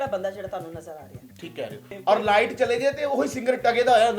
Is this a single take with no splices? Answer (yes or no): no